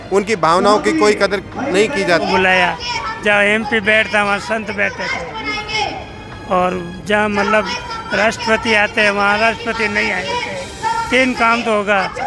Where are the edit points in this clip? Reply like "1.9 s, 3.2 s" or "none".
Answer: 2.2 s